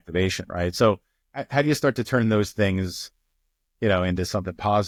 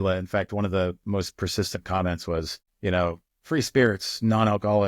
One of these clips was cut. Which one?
second; 2 cuts; at 2.6 s, 3.3 s

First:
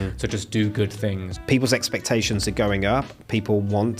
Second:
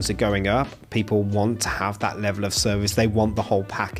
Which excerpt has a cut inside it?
first; 1 cut; at 1.3 s

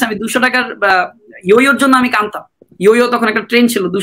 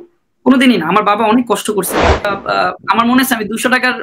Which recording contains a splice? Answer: second; 1 cut; at 2.4 s

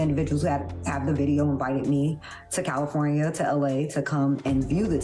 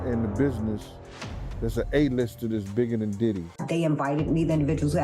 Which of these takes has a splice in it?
second; 1 cut; at 3.6 s

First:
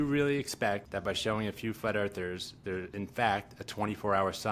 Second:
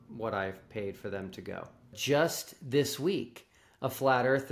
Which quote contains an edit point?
second; 1 cut; at 2.0 s

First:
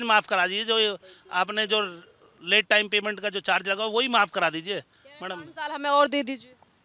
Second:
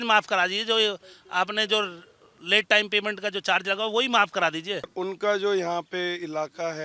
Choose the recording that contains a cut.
second; 1 cut; at 4.9 s

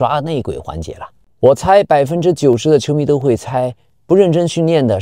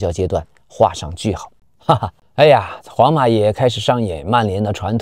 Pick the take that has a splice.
second; 1 cut; at 1.6 s

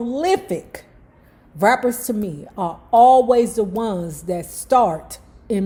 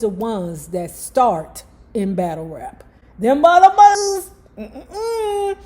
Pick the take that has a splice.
second; 1 cut; at 4.0 s

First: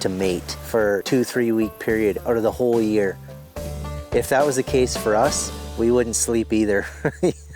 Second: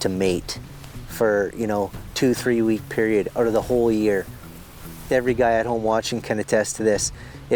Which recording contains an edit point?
first; 2 cuts; at 0.9 s, 3.8 s

